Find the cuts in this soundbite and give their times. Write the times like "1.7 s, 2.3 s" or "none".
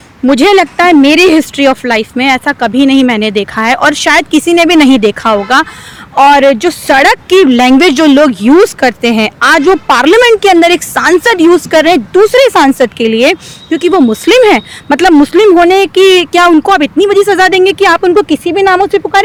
none